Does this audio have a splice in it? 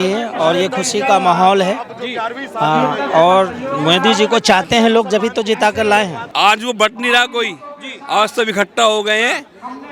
yes; 1 cut; at 6.2 s

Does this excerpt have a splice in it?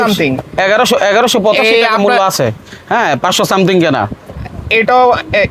no; 0 cuts

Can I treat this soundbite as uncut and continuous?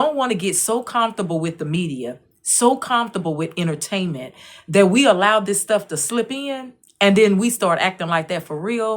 yes; 0 cuts

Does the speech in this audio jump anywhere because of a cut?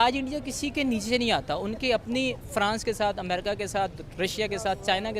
no; 0 cuts

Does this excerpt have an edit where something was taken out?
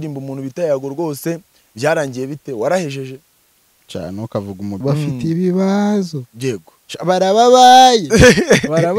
yes; 1 cut; at 4.8 s

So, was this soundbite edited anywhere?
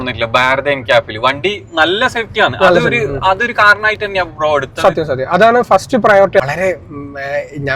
yes; 1 cut; at 6.4 s

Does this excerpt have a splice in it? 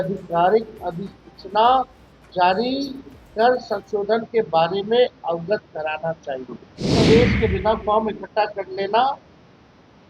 yes; 1 cut; at 6.9 s

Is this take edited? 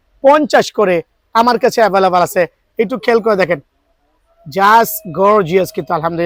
no; 0 cuts

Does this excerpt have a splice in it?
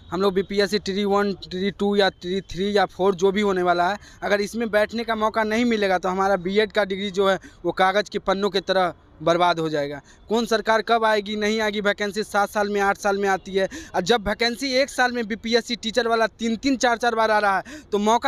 no; 0 cuts

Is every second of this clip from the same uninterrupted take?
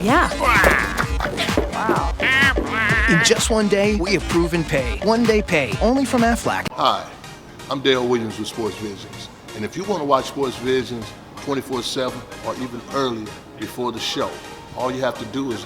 no; 1 cut; at 6.7 s

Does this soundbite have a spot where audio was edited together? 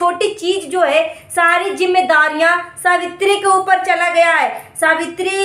no; 0 cuts

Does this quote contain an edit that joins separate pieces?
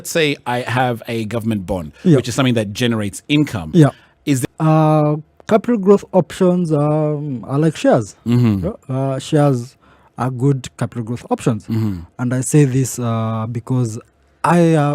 yes; 1 cut; at 4.4 s

